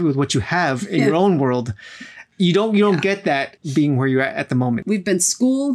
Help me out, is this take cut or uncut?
cut